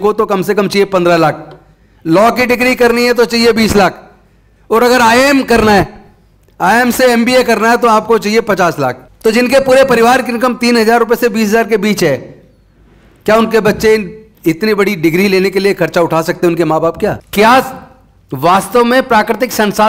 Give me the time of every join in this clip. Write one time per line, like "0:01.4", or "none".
0:09.1
0:17.2